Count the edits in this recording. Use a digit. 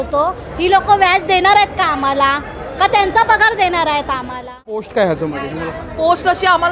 1